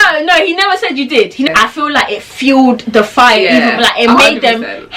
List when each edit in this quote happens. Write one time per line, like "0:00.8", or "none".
0:01.5